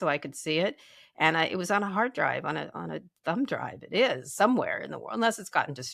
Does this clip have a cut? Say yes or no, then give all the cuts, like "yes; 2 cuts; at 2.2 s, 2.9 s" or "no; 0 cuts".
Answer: no; 0 cuts